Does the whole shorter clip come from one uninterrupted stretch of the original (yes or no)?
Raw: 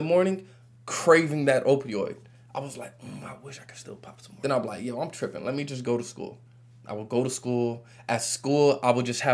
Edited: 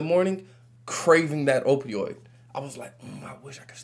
yes